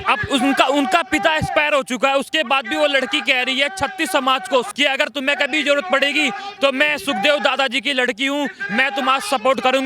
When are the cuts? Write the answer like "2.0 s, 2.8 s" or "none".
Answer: 4.7 s